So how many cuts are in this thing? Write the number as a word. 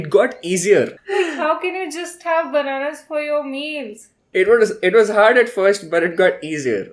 one